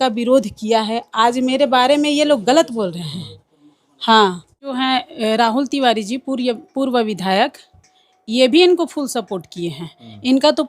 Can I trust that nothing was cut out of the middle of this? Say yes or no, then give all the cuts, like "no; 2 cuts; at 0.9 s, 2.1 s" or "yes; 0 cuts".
no; 1 cut; at 4.8 s